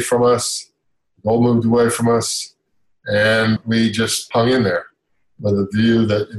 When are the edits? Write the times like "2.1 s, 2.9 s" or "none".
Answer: 3.6 s